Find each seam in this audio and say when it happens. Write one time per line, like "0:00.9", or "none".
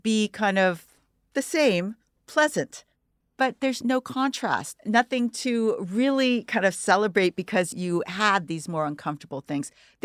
none